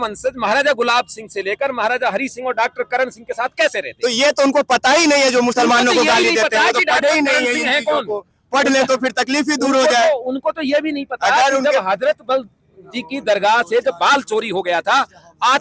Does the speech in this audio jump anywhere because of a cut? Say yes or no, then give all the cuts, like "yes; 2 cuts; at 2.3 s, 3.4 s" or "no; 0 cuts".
no; 0 cuts